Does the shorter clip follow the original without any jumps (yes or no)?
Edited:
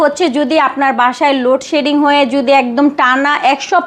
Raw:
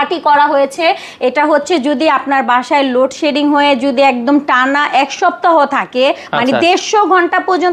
yes